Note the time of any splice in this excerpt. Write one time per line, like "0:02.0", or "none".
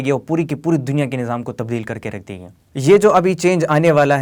none